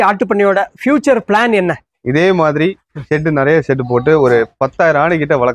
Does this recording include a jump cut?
yes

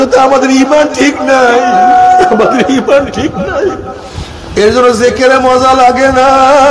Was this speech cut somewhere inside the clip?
yes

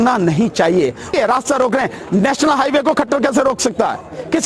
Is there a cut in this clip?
yes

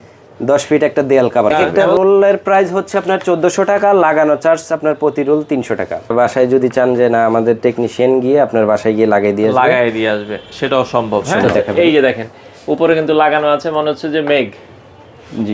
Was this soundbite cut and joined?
yes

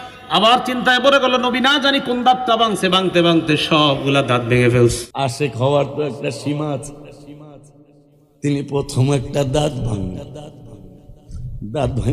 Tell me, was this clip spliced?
yes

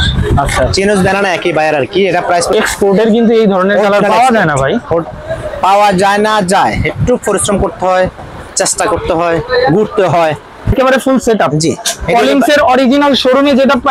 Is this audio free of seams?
no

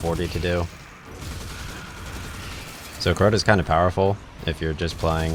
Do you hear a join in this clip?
no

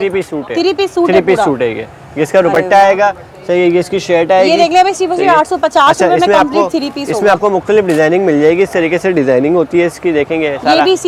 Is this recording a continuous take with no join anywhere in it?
yes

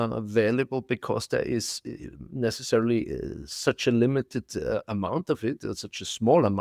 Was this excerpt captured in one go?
yes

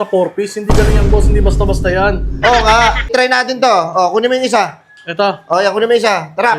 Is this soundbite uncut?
no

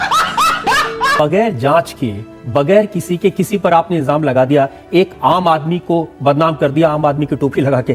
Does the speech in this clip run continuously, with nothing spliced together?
no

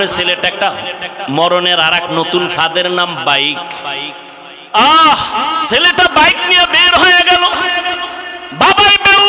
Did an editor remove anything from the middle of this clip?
yes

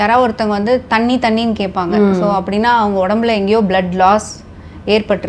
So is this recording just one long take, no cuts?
yes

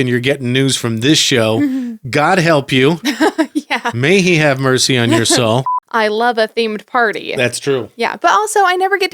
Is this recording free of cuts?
no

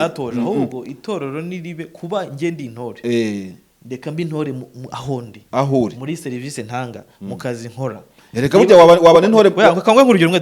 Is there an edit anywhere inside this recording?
no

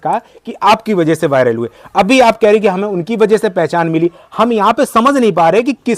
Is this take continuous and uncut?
yes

